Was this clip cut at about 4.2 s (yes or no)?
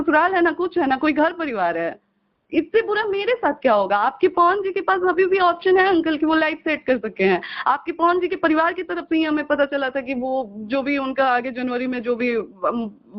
no